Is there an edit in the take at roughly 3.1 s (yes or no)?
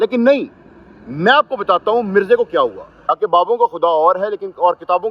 yes